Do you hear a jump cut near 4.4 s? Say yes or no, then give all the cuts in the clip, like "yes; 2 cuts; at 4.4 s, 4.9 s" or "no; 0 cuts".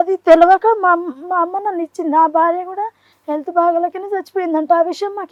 no; 0 cuts